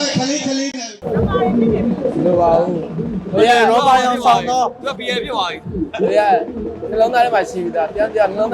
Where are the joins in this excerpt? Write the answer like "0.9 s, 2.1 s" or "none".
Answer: 1.0 s